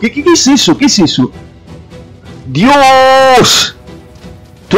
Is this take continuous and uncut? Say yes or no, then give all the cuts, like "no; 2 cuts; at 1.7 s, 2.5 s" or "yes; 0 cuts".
yes; 0 cuts